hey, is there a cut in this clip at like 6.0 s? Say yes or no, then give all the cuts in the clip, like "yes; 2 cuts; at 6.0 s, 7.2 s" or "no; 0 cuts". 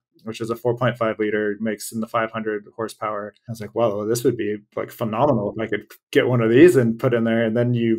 no; 2 cuts; at 1.6 s, 3.4 s